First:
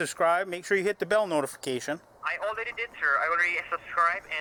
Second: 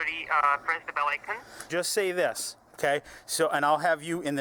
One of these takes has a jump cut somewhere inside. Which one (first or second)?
second